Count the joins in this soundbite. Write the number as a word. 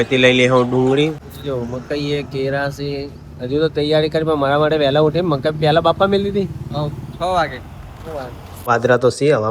two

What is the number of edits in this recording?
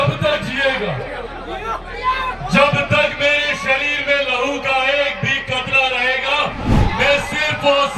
zero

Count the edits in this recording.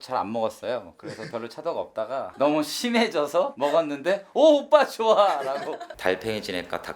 two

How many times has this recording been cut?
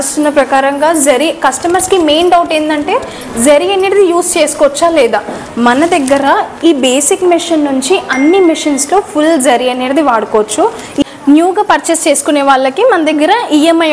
one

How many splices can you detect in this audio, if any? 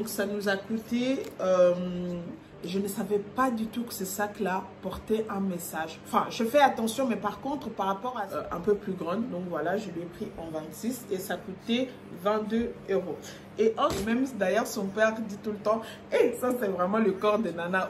three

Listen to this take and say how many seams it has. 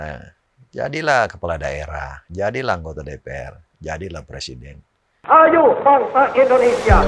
one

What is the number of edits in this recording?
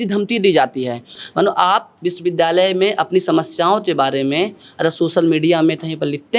one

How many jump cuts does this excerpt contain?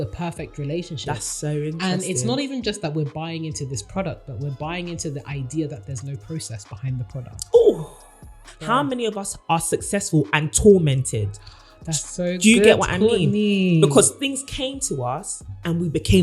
one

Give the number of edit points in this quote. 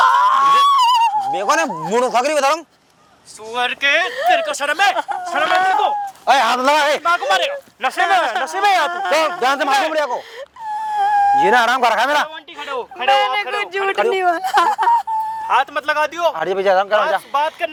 zero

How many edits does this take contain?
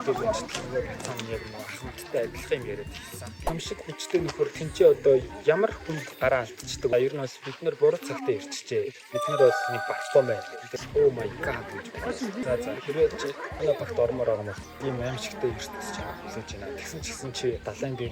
four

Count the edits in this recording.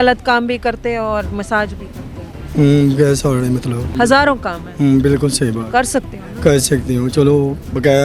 one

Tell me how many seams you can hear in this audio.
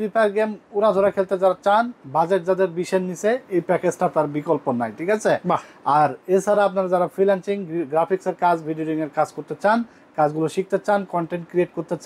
zero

